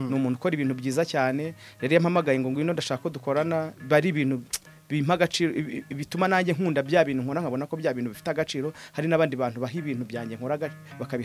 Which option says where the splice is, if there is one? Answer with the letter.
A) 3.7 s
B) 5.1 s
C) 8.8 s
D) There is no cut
D